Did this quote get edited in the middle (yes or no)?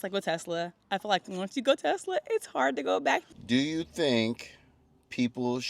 yes